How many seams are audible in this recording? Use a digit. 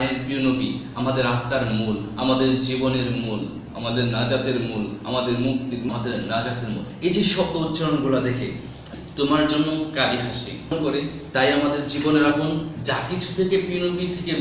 3